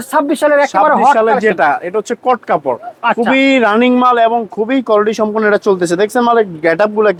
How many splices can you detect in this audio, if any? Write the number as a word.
zero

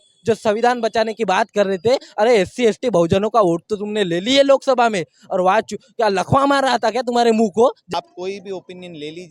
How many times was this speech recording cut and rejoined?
one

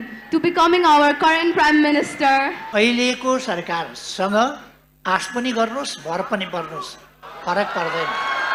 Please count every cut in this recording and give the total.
one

